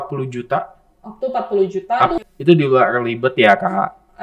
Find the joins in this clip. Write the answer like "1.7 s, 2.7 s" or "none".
2.2 s